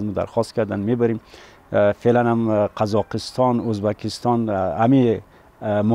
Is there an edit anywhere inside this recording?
no; 0 cuts

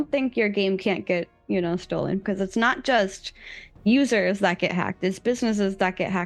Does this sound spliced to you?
yes; 1 cut; at 2.2 s

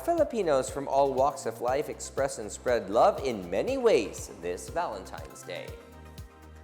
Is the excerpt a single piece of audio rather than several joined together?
no; 1 cut; at 5.7 s

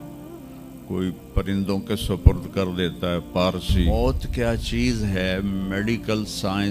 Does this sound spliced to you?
yes; 1 cut; at 3.9 s

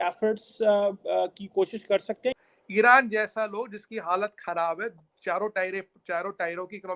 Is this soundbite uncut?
no; 1 cut; at 2.5 s

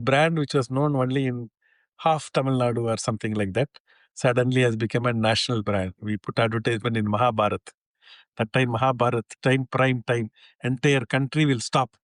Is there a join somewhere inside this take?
no; 0 cuts

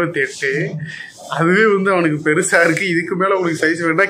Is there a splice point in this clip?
no; 0 cuts

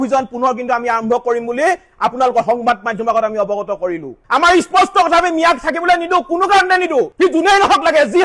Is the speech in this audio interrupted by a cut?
yes; 1 cut; at 4.2 s

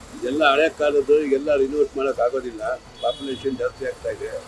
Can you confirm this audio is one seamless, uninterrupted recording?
no; 1 cut; at 2.9 s

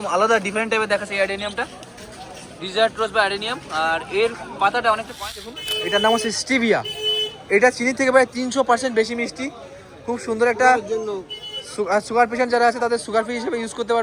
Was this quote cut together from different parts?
yes; 1 cut; at 5.6 s

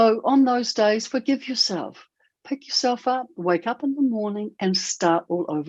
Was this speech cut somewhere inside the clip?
no; 0 cuts

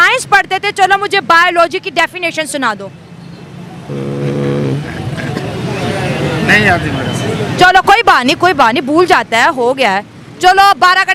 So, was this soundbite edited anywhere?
no; 0 cuts

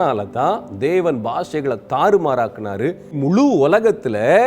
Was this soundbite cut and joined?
yes; 1 cut; at 3.1 s

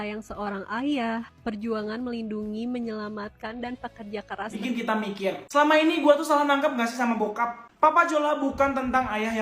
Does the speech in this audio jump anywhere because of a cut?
yes; 1 cut; at 4.6 s

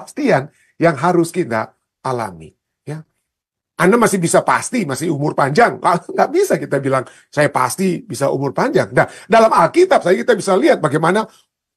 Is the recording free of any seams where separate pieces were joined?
yes; 0 cuts

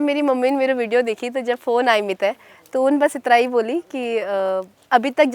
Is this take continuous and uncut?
yes; 0 cuts

